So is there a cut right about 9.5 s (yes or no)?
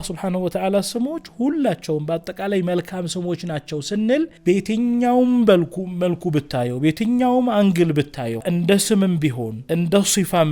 yes